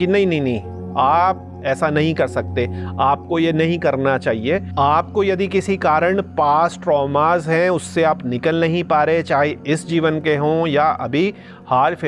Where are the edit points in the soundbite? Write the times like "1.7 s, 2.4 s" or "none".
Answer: 4.7 s